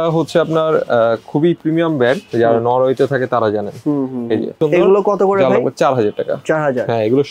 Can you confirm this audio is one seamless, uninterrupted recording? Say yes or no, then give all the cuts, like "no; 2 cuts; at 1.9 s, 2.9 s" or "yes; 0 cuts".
no; 1 cut; at 4.6 s